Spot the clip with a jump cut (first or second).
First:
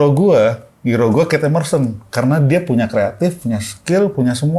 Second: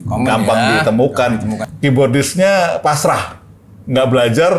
second